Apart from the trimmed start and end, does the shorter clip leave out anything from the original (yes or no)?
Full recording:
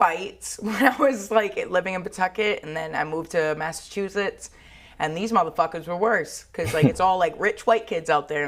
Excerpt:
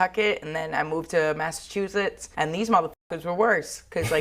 yes